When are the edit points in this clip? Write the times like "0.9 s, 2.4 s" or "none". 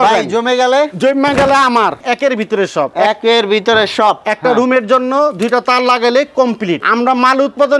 2.0 s, 6.8 s

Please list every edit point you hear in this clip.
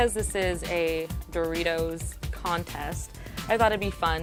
none

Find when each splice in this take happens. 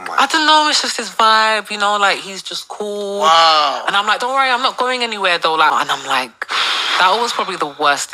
5.7 s

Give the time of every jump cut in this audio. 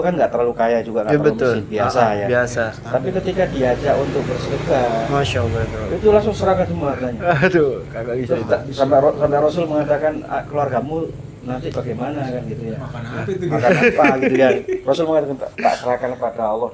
none

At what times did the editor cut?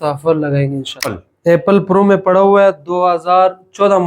1.0 s

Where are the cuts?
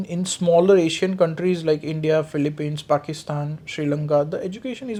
none

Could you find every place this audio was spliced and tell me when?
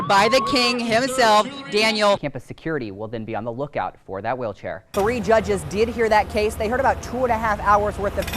2.3 s, 4.8 s

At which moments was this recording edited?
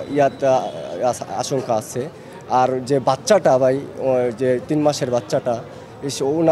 none

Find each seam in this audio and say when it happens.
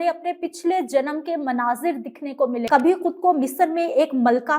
2.7 s

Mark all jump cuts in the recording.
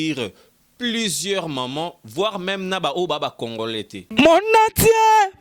4.0 s

